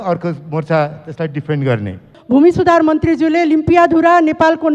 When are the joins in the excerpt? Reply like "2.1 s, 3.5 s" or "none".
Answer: 2.1 s